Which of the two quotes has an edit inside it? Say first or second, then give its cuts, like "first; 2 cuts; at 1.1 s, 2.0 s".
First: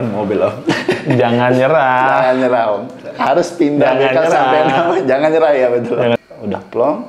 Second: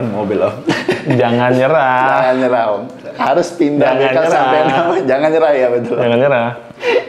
first; 1 cut; at 6.2 s